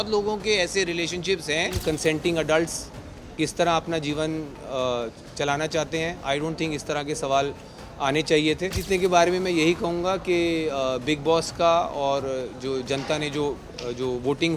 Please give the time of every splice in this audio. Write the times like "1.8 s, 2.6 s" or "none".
1.8 s, 8.8 s